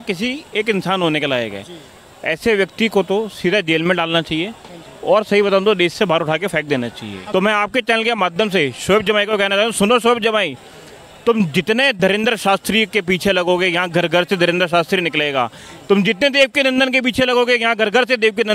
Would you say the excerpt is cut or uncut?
cut